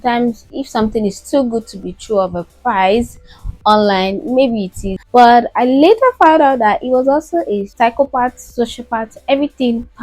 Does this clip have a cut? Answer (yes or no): yes